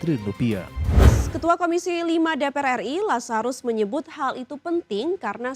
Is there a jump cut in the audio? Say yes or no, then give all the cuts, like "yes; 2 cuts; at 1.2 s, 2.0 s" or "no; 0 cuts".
yes; 1 cut; at 1.2 s